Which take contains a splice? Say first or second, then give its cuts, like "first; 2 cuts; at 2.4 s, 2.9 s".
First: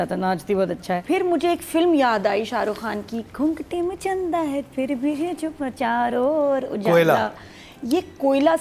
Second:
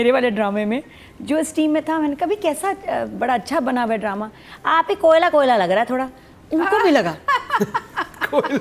first; 1 cut; at 1.0 s